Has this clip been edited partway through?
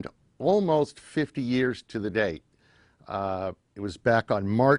yes; 1 cut; at 1.9 s

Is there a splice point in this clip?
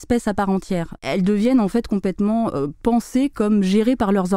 yes; 1 cut; at 1.0 s

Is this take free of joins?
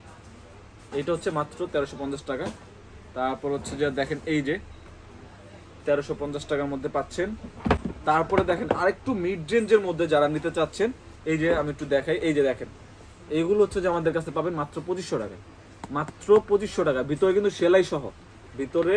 yes; 0 cuts

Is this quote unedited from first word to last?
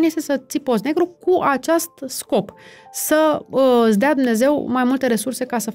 yes; 0 cuts

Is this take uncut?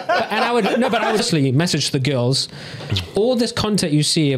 no; 1 cut; at 1.2 s

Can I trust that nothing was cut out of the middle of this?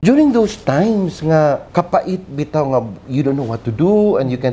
no; 1 cut; at 1.7 s

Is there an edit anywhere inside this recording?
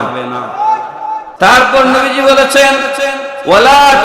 yes; 1 cut; at 1.3 s

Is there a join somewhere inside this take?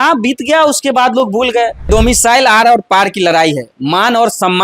yes; 1 cut; at 1.9 s

